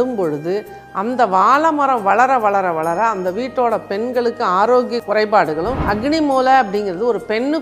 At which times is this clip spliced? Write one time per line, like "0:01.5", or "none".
0:05.8